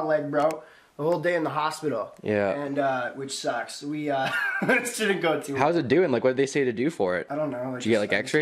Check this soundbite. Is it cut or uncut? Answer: cut